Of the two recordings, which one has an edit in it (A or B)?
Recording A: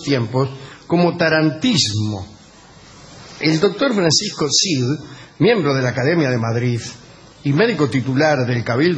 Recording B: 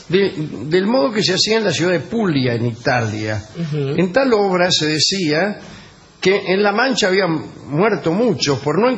A